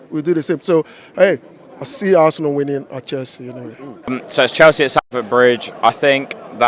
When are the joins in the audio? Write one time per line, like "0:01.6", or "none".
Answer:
0:04.2